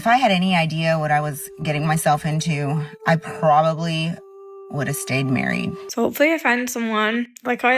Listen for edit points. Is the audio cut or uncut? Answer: cut